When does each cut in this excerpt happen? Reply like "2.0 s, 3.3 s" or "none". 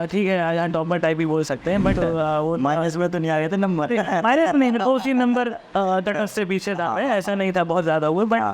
2.0 s